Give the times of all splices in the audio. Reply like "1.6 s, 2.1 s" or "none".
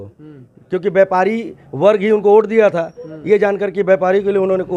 none